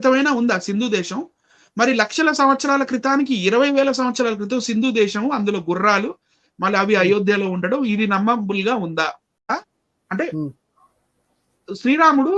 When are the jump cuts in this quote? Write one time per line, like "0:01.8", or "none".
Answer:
0:09.5